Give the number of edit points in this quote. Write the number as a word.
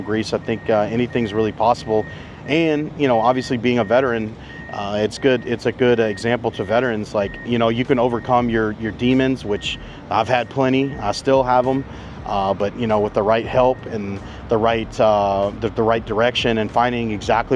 one